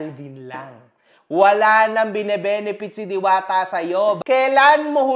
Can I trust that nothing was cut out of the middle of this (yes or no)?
no